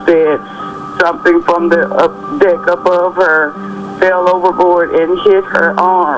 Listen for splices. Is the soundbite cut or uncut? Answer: uncut